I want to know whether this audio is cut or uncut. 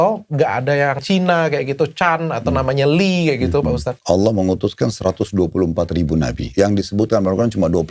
cut